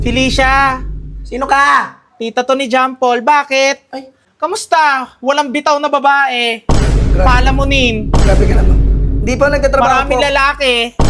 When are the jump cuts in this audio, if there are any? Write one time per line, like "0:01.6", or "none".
0:04.2